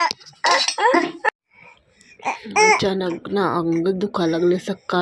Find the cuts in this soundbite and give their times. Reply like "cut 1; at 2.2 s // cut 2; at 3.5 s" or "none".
cut 1; at 1.3 s